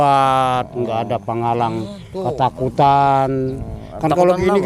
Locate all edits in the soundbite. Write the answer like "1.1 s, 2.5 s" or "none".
none